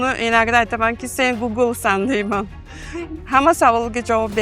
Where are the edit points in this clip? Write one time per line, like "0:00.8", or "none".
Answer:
none